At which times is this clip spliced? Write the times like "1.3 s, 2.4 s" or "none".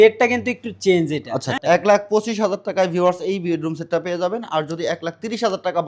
1.5 s